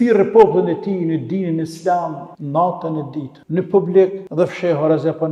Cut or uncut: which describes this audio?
cut